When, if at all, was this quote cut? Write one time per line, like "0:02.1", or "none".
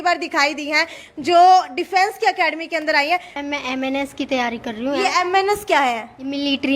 0:03.3